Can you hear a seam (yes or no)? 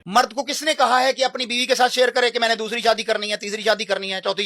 no